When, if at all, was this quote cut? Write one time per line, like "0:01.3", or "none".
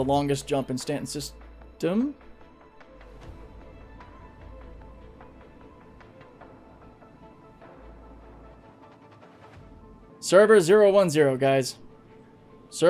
0:10.1